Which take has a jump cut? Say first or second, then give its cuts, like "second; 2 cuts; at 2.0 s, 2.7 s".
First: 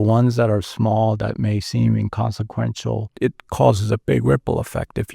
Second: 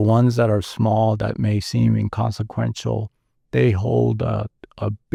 first; 1 cut; at 3.1 s